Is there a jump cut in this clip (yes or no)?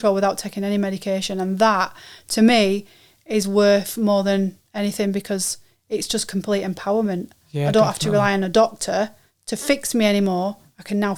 no